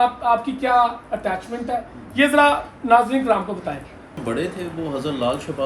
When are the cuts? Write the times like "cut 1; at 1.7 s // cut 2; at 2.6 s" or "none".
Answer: cut 1; at 4.2 s